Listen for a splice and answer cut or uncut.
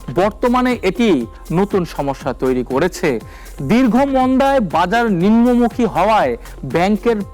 uncut